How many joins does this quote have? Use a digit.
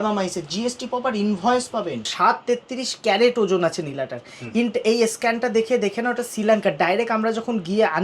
1